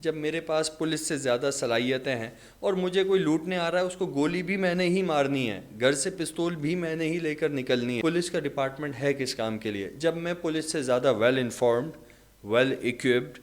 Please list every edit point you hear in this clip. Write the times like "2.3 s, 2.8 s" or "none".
8.0 s